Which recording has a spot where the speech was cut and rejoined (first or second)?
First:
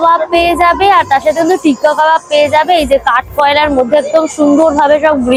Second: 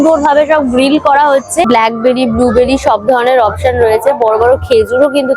second